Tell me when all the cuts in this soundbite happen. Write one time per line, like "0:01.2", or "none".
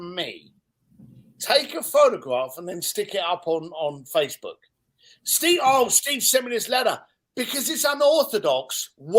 none